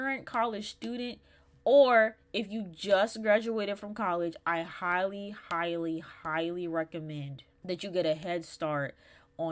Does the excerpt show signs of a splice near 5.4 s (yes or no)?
no